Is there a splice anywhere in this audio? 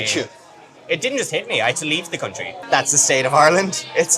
yes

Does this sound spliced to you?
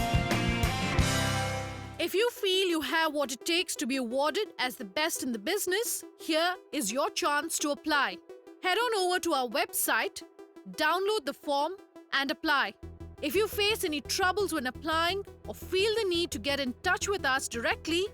yes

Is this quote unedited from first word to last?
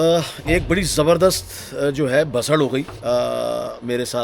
yes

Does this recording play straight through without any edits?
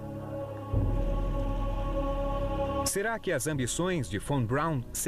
no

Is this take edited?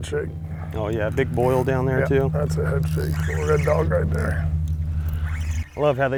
no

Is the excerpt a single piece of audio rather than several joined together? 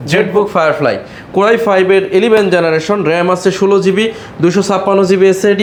yes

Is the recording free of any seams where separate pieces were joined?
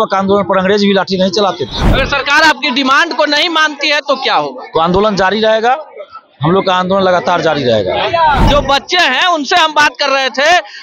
no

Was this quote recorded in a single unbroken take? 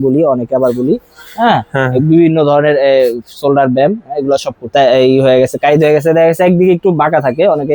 no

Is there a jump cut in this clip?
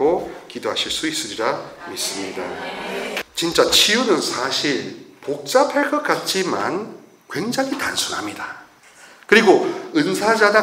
yes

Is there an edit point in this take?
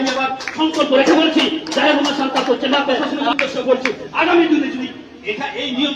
yes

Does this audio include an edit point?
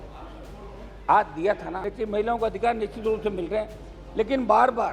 yes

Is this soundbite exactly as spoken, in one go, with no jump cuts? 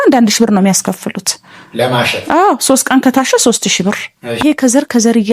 no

